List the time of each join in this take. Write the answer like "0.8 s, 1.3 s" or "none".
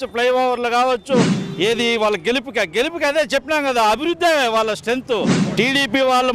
1.4 s, 5.4 s